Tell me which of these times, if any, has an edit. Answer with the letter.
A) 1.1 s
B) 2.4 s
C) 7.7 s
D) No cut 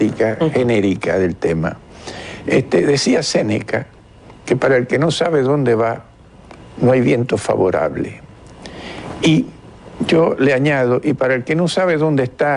B